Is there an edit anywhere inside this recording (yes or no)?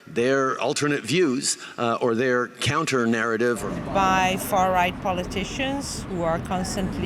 yes